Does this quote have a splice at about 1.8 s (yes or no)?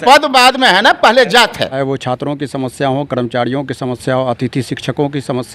yes